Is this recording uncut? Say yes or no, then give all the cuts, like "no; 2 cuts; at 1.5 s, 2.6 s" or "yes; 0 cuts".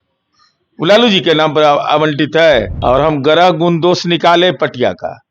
no; 1 cut; at 2.7 s